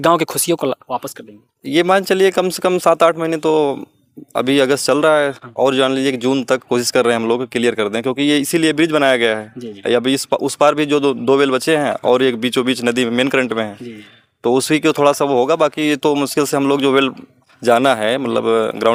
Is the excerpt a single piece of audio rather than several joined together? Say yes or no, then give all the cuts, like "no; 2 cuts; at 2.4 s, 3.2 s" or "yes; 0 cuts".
yes; 0 cuts